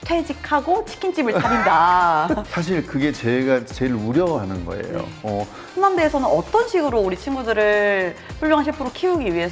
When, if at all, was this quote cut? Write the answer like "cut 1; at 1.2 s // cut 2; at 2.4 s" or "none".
cut 1; at 2.5 s // cut 2; at 5.6 s

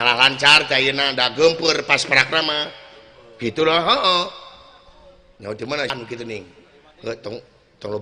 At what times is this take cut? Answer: cut 1; at 5.9 s

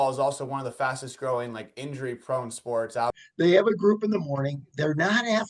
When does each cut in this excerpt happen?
cut 1; at 3.2 s

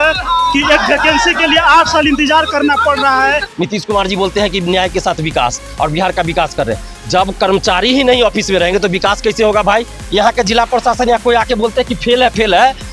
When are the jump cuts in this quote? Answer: cut 1; at 3.5 s // cut 2; at 10.0 s

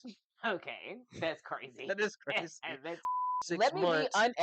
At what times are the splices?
cut 1; at 3.0 s

